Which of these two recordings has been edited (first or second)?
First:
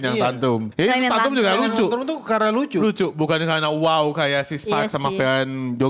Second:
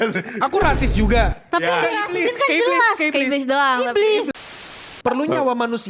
second